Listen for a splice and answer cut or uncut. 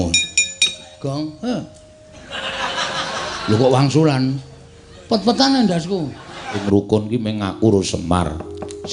cut